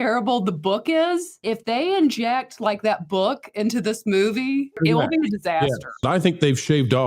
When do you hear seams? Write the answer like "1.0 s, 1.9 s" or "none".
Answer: 1.4 s, 4.8 s, 6.0 s